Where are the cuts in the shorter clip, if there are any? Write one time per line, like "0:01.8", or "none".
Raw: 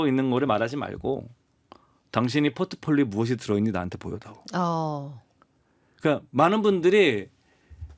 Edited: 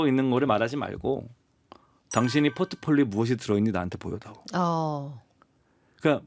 none